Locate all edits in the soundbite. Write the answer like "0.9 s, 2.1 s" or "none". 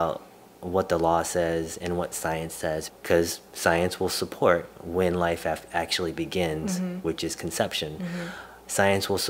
2.9 s